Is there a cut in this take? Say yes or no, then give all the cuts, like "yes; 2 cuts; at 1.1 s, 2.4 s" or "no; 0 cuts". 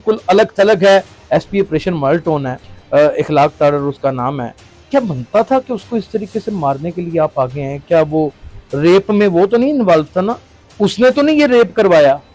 yes; 1 cut; at 1.2 s